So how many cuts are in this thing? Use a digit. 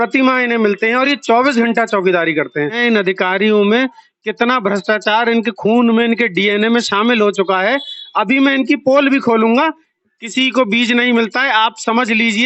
2